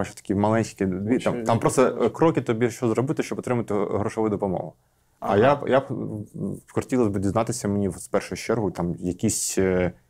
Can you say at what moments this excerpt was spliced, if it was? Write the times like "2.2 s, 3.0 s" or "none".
none